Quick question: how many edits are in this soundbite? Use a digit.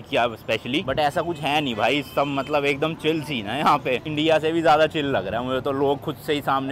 0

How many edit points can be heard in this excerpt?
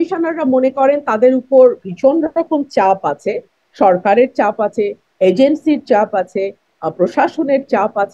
0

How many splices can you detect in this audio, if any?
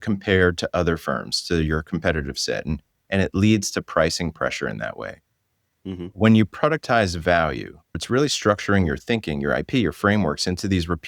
1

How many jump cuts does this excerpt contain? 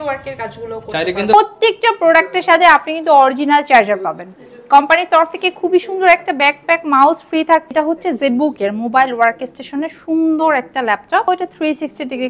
3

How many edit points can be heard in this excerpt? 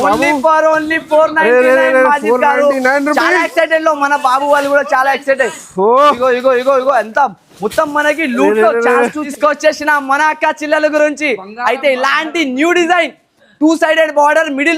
1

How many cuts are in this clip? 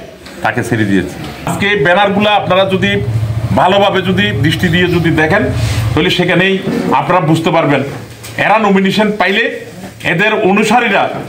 1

